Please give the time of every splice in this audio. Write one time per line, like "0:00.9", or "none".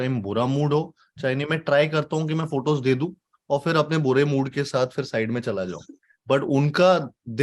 none

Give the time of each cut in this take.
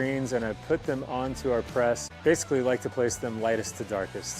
0:02.1

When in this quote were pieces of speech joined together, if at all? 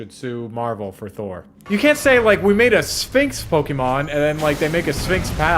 0:01.5

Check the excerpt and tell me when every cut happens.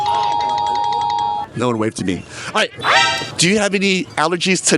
0:02.9

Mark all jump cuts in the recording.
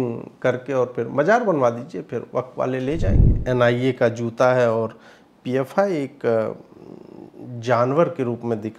0:03.3

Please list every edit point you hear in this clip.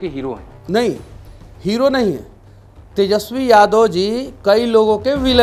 none

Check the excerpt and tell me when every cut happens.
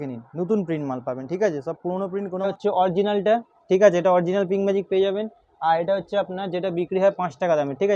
0:02.5

